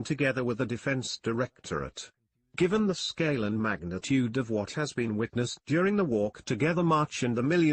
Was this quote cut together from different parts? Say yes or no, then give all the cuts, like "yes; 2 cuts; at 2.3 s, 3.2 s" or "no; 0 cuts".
yes; 1 cut; at 2.2 s